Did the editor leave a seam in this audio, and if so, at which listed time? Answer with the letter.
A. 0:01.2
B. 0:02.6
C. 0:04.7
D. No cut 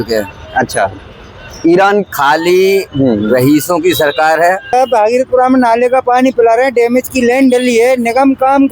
C